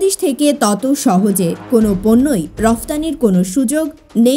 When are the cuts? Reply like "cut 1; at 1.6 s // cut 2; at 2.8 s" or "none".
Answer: none